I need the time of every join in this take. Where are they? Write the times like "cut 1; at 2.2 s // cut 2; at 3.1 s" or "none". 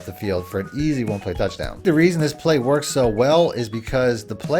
cut 1; at 1.8 s